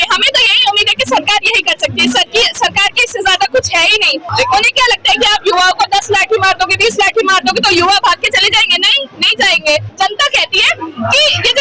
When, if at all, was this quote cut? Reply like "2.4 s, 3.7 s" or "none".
4.2 s, 9.9 s

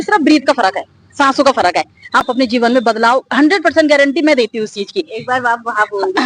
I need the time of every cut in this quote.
2.2 s

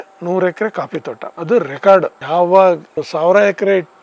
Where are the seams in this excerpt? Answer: none

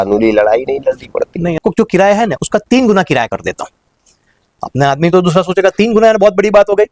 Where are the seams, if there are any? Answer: 1.6 s

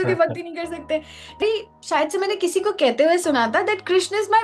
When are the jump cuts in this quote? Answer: 1.4 s

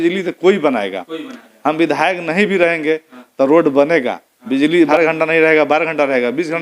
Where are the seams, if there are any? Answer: 4.9 s

